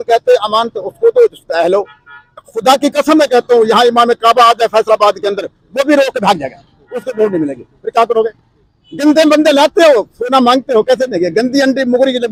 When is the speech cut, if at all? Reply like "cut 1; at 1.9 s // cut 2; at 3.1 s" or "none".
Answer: none